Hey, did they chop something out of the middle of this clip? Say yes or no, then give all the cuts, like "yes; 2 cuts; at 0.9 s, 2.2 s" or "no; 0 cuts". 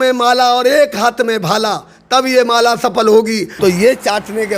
yes; 1 cut; at 3.5 s